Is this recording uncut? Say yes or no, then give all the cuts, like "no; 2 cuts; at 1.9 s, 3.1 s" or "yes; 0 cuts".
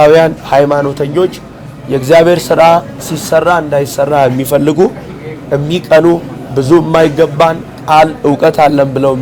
yes; 0 cuts